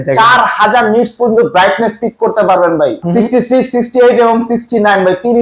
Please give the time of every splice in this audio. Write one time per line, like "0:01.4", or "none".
0:03.0